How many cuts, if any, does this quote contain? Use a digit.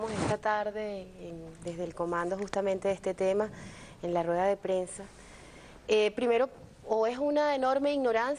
1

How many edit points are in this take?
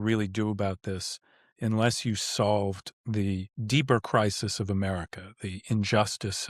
1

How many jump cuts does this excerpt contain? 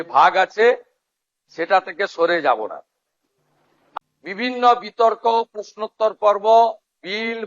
1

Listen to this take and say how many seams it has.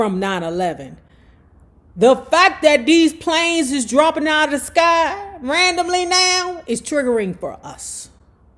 0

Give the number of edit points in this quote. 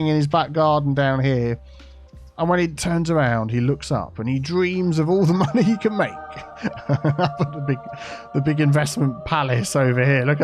0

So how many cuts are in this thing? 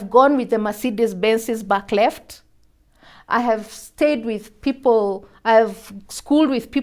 0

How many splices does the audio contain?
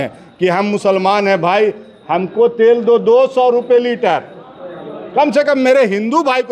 0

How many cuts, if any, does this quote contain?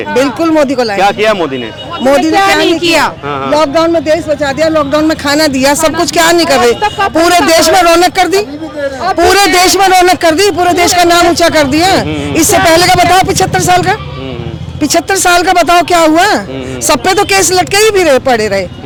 0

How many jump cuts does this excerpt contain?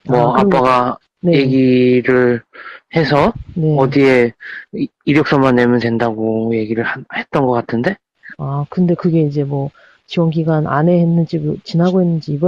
1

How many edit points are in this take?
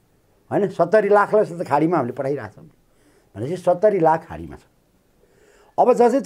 0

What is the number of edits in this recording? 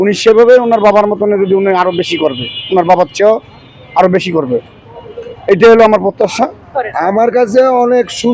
1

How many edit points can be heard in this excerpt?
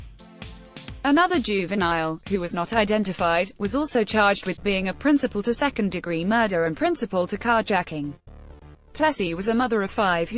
1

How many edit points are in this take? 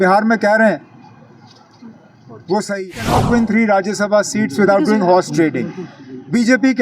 1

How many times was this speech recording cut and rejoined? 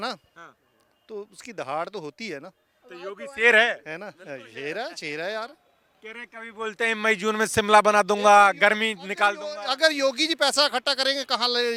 0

